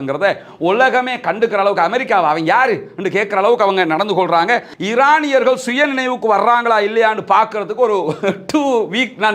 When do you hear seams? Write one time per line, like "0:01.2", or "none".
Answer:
0:04.7